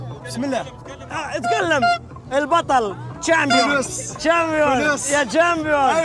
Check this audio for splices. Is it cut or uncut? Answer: uncut